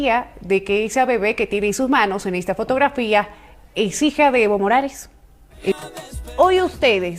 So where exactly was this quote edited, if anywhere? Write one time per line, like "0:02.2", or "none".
0:05.6